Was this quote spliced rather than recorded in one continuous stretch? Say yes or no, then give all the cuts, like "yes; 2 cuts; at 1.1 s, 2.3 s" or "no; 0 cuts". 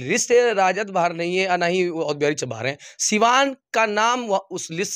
no; 0 cuts